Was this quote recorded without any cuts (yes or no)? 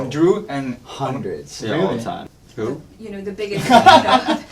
no